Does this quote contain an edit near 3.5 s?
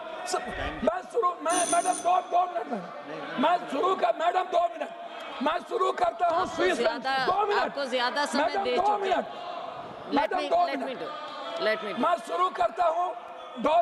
no; 0 cuts

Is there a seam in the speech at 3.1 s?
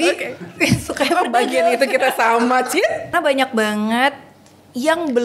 yes; 1 cut; at 3.1 s

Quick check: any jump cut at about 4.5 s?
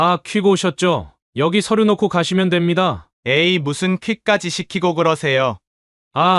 no; 2 cuts; at 1.2 s, 3.1 s

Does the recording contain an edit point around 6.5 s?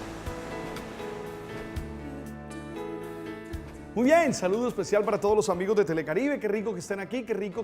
yes; 1 cut; at 6.5 s

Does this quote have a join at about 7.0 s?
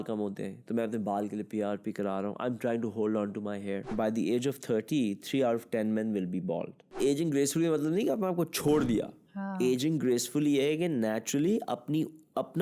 yes; 2 cuts; at 3.9 s, 7.0 s

